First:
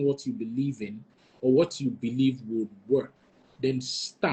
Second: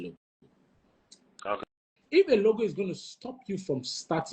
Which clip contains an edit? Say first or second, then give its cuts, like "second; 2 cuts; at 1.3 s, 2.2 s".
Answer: second; 1 cut; at 1.9 s